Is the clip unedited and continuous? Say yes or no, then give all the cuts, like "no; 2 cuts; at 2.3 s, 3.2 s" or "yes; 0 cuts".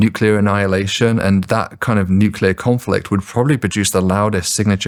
yes; 0 cuts